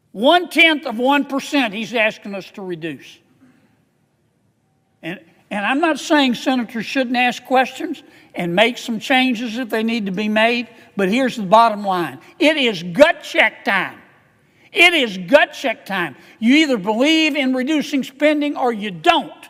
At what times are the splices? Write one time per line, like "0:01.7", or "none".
none